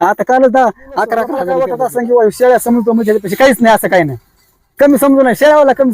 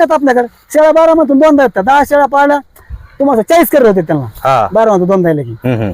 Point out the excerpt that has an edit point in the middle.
first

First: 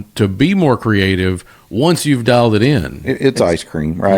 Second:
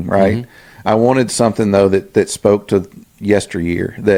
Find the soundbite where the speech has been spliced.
first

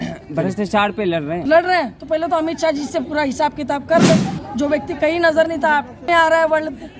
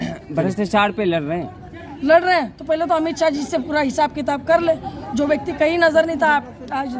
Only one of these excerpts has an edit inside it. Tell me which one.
first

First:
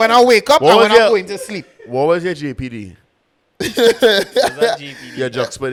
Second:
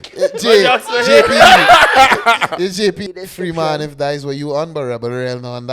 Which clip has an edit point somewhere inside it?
second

